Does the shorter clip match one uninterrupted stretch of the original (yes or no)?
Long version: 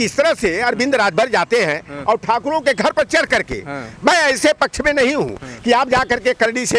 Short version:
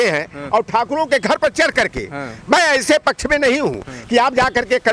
yes